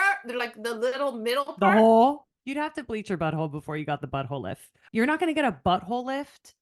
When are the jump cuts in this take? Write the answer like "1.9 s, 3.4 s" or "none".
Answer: 2.3 s, 4.7 s